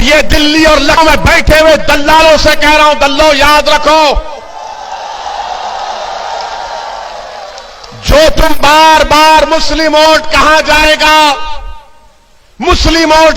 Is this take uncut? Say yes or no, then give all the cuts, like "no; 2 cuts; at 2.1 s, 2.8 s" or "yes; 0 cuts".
no; 1 cut; at 1.0 s